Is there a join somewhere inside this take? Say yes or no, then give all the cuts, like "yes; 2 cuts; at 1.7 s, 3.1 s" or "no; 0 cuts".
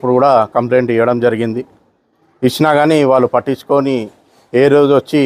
no; 0 cuts